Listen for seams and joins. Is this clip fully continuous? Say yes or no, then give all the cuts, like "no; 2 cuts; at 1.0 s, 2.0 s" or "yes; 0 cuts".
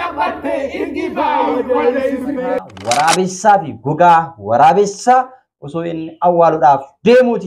no; 1 cut; at 2.7 s